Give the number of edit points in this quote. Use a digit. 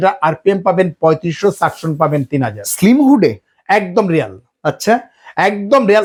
0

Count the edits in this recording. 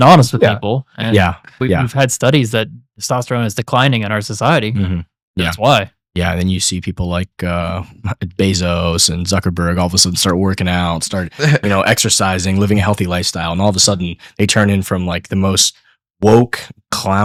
0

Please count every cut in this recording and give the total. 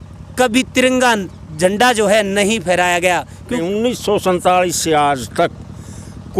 1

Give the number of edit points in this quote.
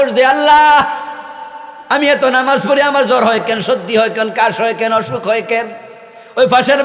0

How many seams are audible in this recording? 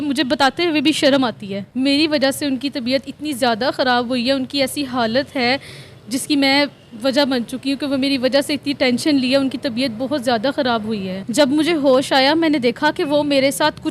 2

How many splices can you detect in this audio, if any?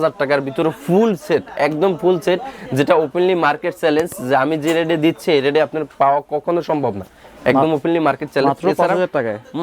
0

